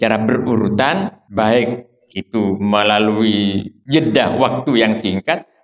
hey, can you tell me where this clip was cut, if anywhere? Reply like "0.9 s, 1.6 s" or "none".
1.2 s, 3.7 s